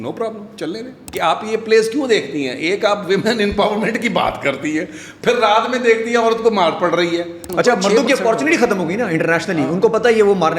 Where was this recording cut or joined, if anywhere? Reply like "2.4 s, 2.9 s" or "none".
1.1 s, 7.4 s